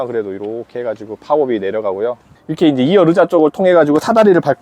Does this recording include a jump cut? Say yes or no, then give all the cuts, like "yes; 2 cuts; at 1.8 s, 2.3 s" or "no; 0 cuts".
yes; 1 cut; at 2.3 s